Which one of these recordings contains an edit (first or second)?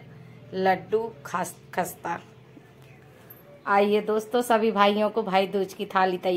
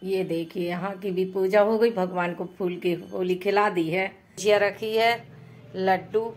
second